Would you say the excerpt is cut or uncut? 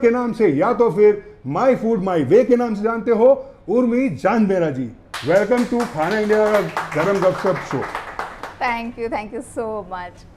uncut